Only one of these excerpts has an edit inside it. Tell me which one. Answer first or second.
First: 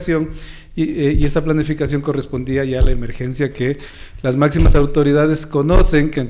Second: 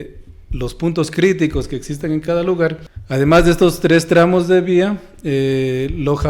second